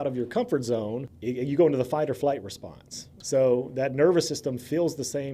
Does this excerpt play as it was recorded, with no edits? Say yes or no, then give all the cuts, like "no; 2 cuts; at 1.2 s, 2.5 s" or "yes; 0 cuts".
no; 2 cuts; at 1.1 s, 3.2 s